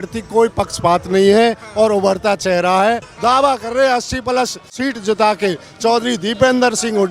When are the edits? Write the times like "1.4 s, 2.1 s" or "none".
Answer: 3.1 s, 4.8 s